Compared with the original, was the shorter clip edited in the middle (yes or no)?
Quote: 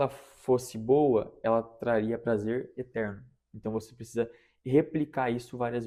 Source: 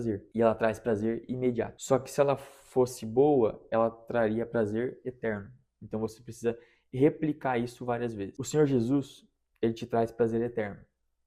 no